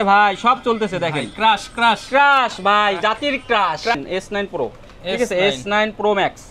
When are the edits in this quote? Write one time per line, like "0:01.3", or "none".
0:03.9